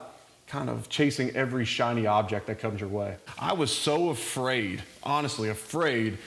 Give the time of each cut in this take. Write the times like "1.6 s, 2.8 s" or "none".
3.3 s